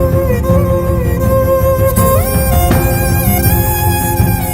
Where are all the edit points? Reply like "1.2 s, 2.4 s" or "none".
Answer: none